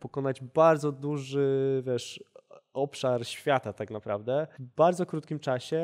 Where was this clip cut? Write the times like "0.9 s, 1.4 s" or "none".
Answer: 4.6 s